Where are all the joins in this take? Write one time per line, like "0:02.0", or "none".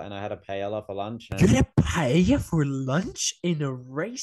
0:01.4